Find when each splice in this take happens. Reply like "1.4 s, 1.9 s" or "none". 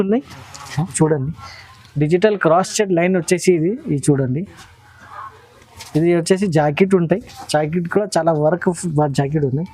0.9 s

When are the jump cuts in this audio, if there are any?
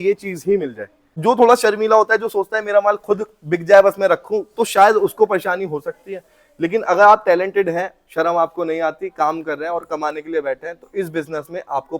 1.1 s

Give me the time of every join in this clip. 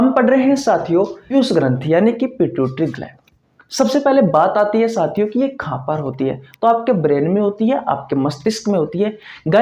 1.2 s

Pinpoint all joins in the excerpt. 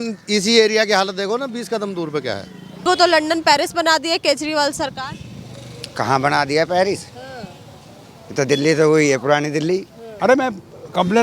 2.9 s, 10.0 s

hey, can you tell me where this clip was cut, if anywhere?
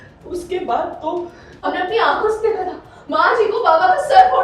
1.4 s

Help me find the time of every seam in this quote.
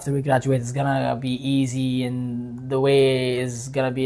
none

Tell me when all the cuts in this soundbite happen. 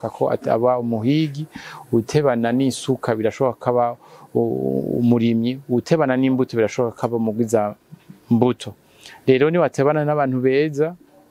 none

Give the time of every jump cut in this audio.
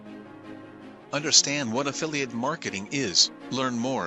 1.1 s

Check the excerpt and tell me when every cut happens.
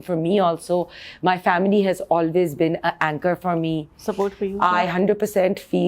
none

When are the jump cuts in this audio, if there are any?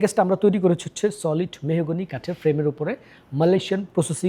none

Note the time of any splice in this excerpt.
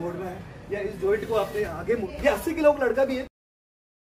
2.1 s

